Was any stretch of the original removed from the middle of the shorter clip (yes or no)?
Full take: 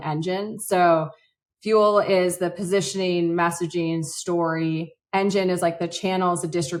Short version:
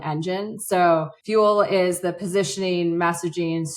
yes